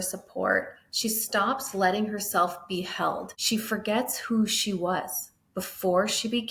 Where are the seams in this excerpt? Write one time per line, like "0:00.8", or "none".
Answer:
0:03.3

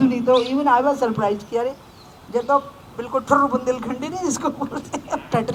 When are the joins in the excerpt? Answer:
none

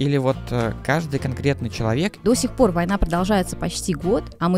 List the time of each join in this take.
0:02.2

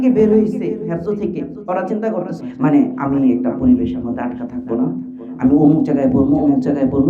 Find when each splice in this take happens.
0:02.4

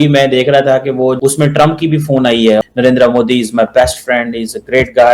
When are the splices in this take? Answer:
0:01.2
0:02.6

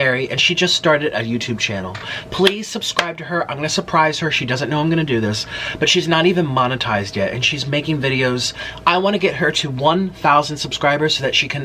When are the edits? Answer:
none

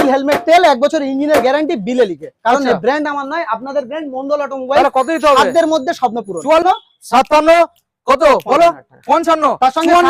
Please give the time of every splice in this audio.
0:06.6

